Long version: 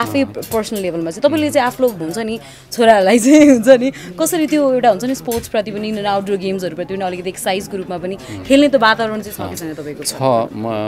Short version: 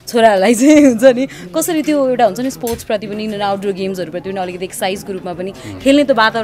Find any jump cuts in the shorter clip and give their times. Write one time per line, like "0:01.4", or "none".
none